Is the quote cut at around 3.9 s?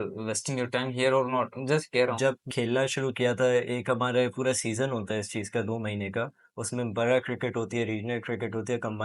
no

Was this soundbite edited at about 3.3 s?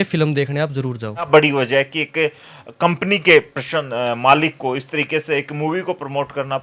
yes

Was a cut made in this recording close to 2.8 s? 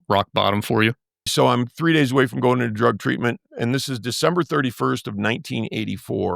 no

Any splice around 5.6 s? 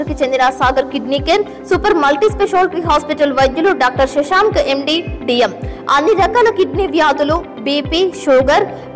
no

